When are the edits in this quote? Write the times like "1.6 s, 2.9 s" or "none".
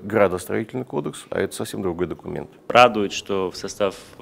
2.6 s